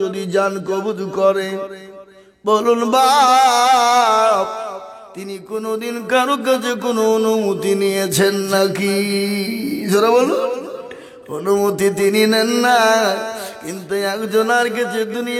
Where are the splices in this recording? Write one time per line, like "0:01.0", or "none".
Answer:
none